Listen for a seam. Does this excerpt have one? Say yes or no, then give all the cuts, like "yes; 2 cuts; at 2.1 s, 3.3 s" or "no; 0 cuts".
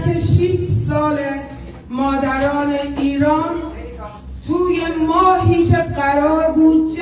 no; 0 cuts